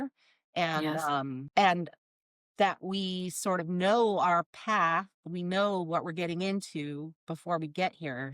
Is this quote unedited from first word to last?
no; 1 cut; at 1.4 s

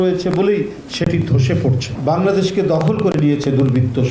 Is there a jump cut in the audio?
yes; 1 cut; at 1.9 s

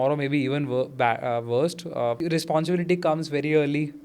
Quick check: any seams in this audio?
yes; 1 cut; at 2.2 s

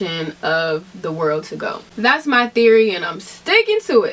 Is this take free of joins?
no; 1 cut; at 1.8 s

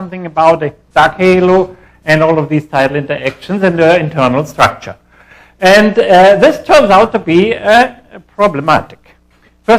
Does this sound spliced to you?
yes; 1 cut; at 2.5 s

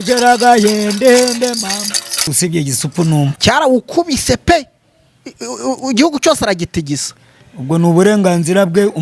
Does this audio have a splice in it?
yes; 2 cuts; at 2.3 s, 3.3 s

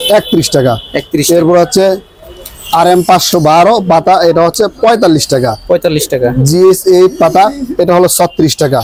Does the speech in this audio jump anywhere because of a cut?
no; 0 cuts

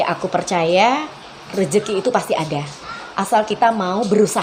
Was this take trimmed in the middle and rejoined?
no; 0 cuts

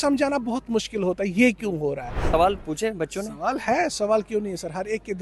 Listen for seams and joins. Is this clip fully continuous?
no; 1 cut; at 2.1 s

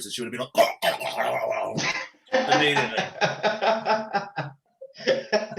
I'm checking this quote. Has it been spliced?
no; 0 cuts

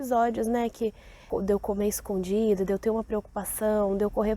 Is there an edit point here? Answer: yes; 1 cut; at 1.2 s

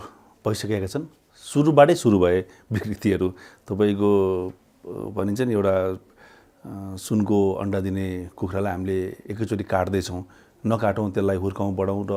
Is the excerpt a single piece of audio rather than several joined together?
yes; 0 cuts

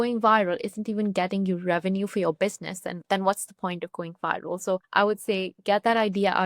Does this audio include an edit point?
yes; 2 cuts; at 2.9 s, 4.9 s

